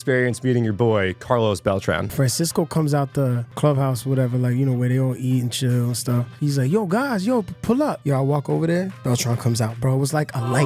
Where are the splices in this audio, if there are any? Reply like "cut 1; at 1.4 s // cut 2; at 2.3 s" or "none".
cut 1; at 2.1 s // cut 2; at 3.5 s // cut 3; at 6.3 s // cut 4; at 8.0 s